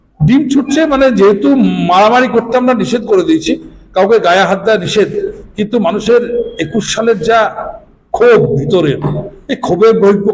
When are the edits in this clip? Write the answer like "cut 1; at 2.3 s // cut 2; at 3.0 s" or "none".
none

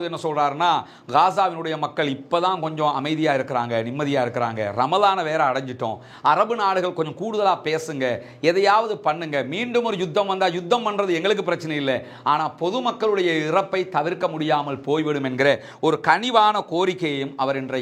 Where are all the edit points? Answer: none

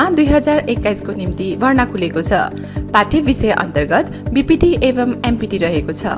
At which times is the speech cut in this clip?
none

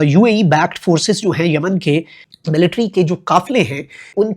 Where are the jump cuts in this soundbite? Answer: cut 1; at 2.2 s

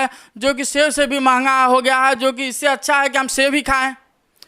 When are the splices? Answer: none

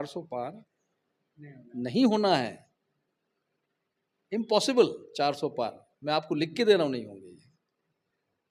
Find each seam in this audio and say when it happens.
none

